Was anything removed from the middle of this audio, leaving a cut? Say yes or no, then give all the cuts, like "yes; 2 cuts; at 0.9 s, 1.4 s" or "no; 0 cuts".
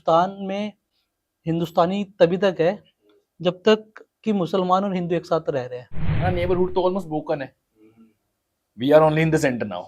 yes; 1 cut; at 6.3 s